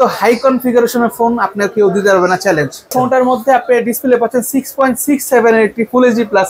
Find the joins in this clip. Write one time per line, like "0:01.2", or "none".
0:02.9